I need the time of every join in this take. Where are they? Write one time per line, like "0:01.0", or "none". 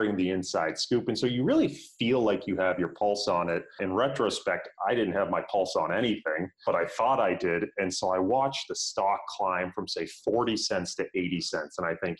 none